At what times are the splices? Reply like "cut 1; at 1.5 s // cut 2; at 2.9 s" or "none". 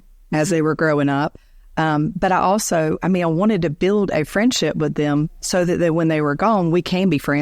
none

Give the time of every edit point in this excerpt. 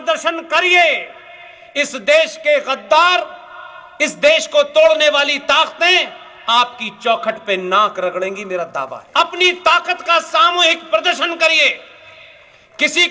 cut 1; at 9.0 s

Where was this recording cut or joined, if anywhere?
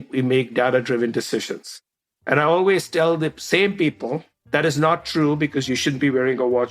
cut 1; at 4.3 s // cut 2; at 5.6 s

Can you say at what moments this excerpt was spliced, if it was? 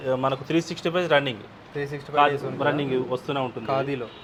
none

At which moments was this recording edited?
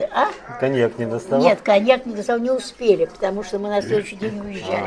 none

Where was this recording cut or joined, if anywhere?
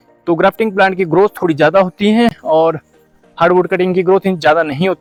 none

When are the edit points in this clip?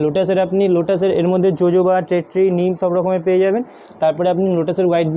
none

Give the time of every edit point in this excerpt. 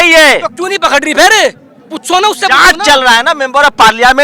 none

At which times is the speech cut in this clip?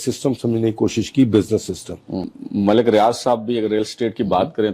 cut 1; at 2.3 s

